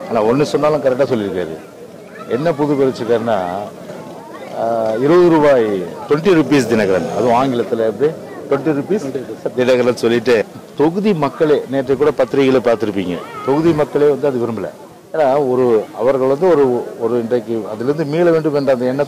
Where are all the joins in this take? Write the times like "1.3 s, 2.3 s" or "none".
10.5 s